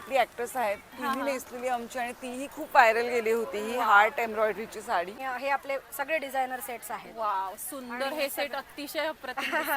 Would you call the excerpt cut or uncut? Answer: cut